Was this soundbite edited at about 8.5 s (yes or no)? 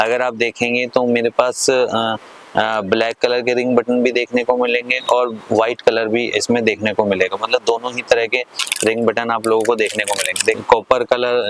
no